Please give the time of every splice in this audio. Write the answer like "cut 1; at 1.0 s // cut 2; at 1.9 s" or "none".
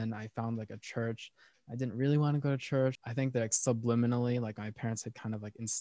cut 1; at 3.0 s